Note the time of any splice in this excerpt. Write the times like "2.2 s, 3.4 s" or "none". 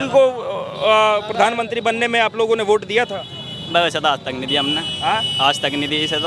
none